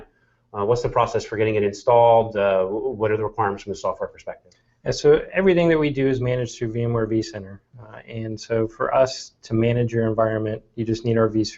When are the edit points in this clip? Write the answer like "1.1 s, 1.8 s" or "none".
7.0 s